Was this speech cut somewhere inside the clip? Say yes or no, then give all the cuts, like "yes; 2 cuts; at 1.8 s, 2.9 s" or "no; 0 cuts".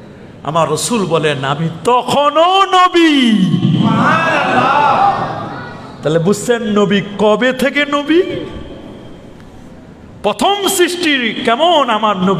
no; 0 cuts